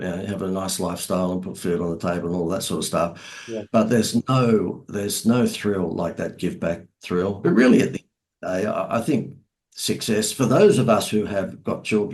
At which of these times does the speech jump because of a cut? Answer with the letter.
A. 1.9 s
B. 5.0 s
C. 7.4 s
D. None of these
C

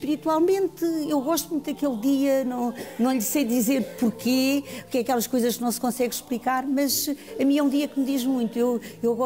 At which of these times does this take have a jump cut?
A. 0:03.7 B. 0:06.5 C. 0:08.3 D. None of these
D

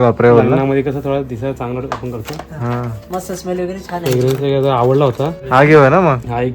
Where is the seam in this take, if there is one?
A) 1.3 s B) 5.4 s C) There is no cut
B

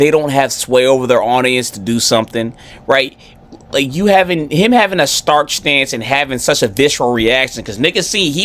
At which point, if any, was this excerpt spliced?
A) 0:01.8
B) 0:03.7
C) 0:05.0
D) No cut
D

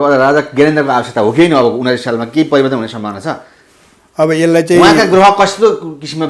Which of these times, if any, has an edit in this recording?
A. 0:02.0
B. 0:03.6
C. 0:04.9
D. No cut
D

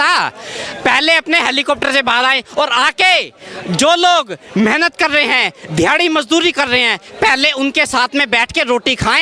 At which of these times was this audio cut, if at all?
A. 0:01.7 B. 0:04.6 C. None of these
C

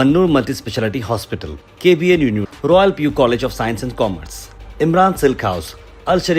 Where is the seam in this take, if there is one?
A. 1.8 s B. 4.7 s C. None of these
C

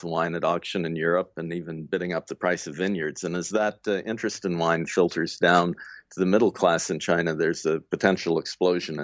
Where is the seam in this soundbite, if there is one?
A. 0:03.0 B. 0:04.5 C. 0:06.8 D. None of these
D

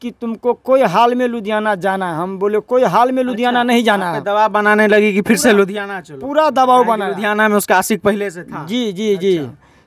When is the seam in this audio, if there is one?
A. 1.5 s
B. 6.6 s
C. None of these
C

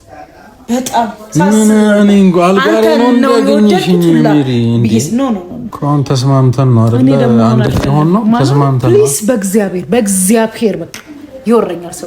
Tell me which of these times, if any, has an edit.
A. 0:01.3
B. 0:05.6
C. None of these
B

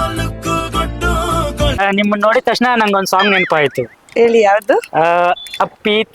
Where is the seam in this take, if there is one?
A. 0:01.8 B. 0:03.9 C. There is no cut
A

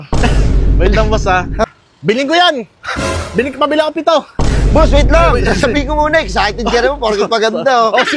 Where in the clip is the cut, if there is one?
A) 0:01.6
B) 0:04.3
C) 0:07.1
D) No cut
A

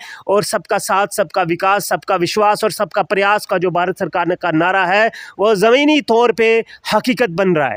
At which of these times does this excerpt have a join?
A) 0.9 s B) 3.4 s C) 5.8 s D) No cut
D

